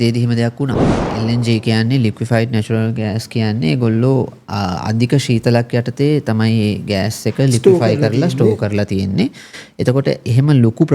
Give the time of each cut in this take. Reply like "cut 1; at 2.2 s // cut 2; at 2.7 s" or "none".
cut 1; at 0.9 s

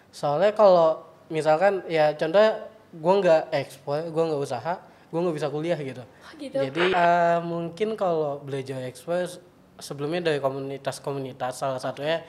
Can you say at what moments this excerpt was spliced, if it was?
cut 1; at 6.9 s

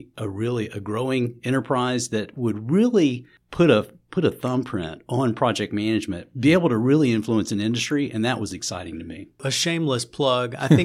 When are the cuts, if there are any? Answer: cut 1; at 9.5 s

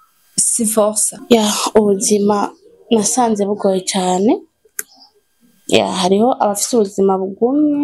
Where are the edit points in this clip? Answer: cut 1; at 1.1 s

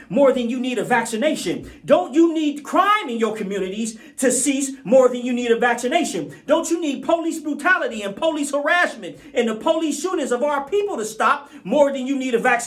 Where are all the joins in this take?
none

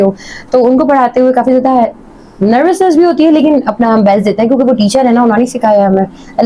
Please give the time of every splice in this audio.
none

